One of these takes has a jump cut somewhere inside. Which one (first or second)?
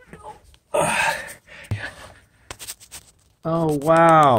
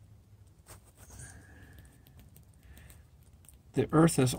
first